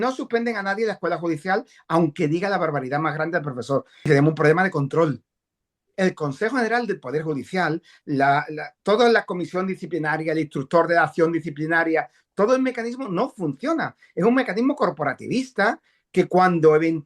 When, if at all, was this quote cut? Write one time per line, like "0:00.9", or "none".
0:04.1